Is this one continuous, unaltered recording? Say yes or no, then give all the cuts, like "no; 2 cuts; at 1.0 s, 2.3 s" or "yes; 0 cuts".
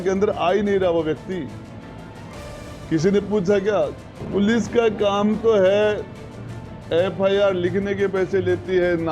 no; 1 cut; at 4.1 s